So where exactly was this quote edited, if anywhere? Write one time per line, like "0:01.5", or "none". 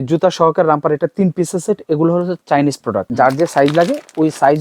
0:03.1